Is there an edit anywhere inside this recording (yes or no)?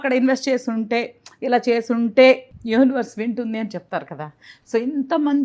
yes